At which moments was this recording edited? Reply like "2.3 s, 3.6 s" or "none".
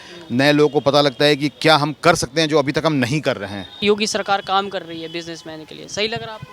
3.8 s